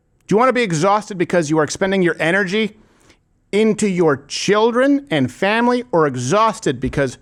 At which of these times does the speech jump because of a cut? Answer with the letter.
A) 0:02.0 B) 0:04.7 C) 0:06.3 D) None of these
D